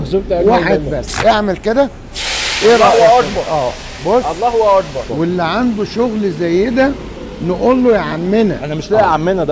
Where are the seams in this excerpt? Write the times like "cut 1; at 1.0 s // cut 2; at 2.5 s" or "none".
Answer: cut 1; at 1.1 s // cut 2; at 5.1 s